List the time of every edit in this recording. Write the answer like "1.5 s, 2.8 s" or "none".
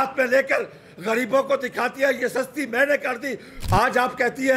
3.5 s